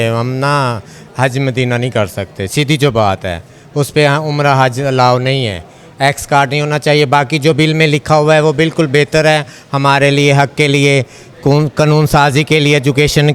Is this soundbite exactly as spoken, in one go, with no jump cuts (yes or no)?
yes